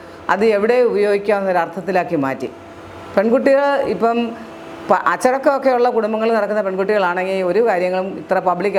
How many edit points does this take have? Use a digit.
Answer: 0